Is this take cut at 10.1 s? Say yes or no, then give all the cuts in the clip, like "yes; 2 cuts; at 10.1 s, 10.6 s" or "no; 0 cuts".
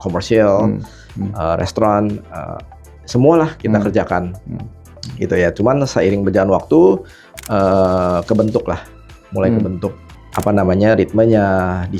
yes; 1 cut; at 10.1 s